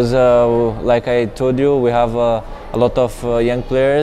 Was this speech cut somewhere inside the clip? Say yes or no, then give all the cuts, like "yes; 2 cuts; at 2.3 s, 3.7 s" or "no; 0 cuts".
no; 0 cuts